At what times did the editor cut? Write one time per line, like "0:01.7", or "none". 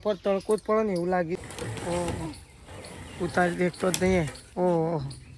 0:01.4